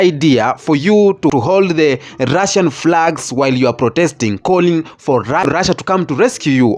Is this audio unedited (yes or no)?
no